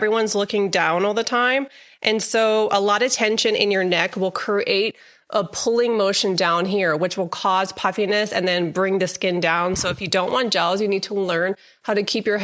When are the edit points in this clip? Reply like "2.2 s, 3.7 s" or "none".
none